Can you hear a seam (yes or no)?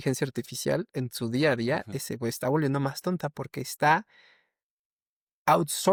no